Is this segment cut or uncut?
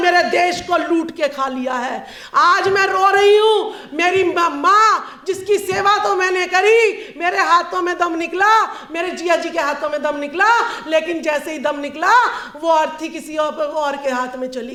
uncut